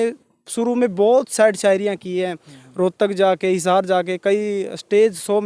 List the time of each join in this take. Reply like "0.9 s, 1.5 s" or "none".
none

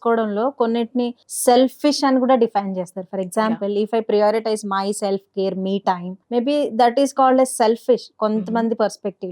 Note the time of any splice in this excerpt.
1.2 s, 6.1 s

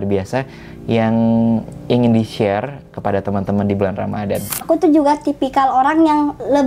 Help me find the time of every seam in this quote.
4.5 s

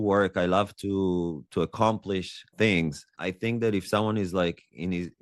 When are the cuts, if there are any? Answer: 3.1 s

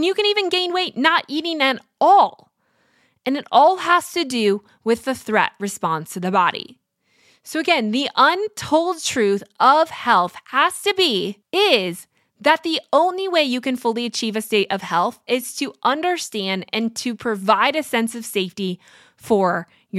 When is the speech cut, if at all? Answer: 11.4 s

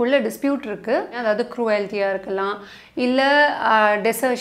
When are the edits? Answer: 1.1 s

